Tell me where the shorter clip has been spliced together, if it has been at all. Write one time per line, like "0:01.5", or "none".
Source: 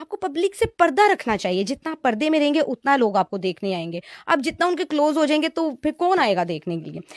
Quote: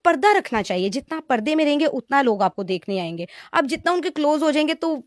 none